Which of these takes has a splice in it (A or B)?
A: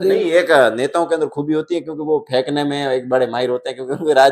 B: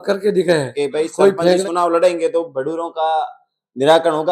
B